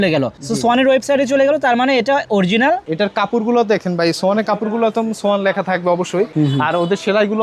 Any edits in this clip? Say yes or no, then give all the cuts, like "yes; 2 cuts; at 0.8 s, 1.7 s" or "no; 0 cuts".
yes; 2 cuts; at 2.9 s, 6.3 s